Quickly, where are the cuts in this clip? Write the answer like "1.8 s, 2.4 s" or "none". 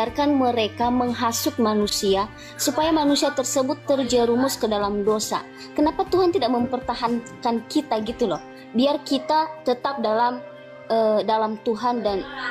none